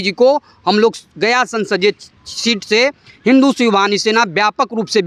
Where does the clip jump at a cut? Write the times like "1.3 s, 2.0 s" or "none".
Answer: none